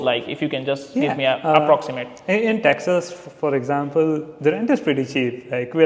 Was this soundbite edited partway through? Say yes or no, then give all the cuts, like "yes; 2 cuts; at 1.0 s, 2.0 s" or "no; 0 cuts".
no; 0 cuts